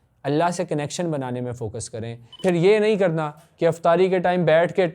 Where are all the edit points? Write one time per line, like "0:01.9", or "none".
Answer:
0:02.4

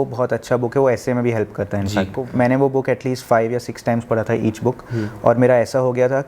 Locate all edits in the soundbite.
0:02.2

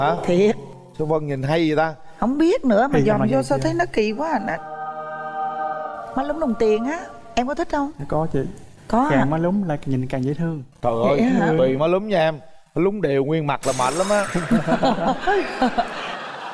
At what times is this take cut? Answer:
none

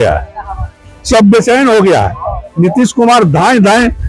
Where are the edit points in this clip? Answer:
none

